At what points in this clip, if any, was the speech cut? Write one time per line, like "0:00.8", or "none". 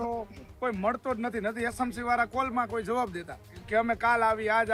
none